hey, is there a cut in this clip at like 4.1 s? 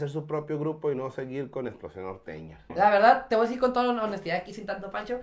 no; 1 cut; at 2.7 s

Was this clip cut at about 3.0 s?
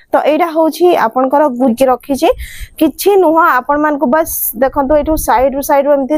no; 1 cut; at 1.6 s

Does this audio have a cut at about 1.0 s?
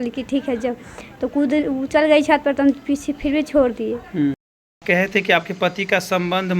no; 1 cut; at 4.4 s

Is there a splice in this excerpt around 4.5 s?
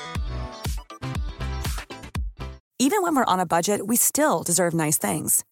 no; 1 cut; at 2.6 s

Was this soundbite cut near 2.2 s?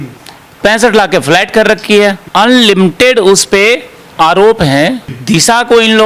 yes; 2 cuts; at 2.2 s, 5.0 s

